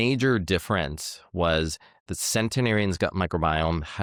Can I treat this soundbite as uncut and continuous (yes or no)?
yes